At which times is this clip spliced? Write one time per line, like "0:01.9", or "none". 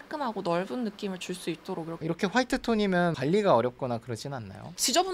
none

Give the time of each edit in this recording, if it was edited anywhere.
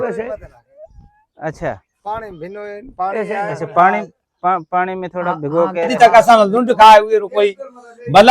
0:05.9

